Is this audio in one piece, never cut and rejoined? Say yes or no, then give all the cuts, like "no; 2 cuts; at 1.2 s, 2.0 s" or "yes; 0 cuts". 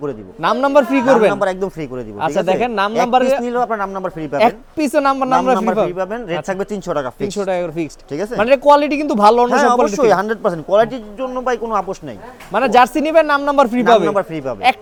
yes; 0 cuts